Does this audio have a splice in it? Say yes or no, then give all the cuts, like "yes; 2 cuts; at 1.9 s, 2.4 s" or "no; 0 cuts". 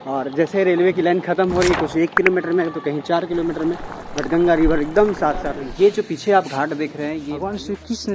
yes; 2 cuts; at 5.4 s, 7.3 s